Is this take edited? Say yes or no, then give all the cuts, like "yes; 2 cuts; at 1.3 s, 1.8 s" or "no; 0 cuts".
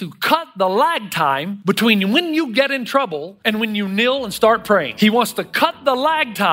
yes; 3 cuts; at 1.5 s, 3.3 s, 4.9 s